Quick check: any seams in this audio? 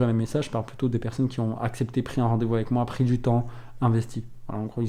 no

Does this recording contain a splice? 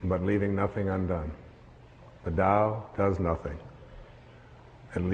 no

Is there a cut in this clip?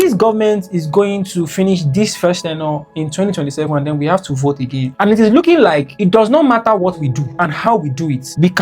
yes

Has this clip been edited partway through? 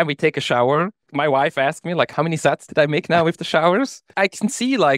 yes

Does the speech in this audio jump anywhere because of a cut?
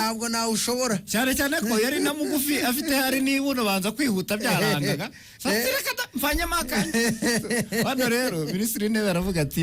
no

